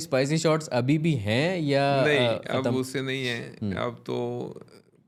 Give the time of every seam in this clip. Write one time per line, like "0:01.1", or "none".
none